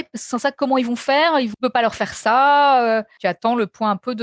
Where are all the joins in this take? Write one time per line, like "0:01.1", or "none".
0:01.5
0:03.1